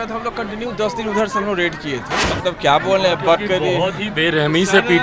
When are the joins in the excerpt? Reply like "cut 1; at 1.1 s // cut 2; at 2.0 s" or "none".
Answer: cut 1; at 2.2 s